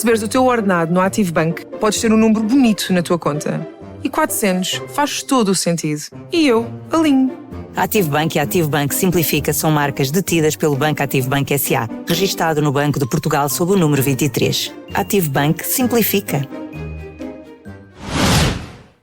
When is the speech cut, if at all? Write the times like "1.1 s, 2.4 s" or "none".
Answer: 17.9 s